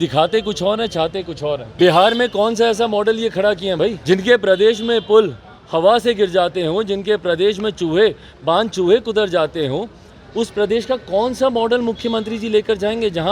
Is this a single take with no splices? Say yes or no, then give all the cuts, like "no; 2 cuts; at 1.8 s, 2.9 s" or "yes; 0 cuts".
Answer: no; 2 cuts; at 1.7 s, 4.0 s